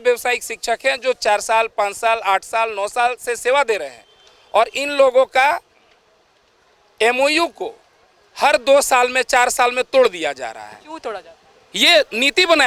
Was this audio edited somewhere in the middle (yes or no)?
no